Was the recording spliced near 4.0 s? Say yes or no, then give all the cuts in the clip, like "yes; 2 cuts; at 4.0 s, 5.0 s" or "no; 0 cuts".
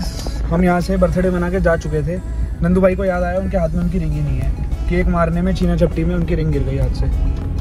no; 0 cuts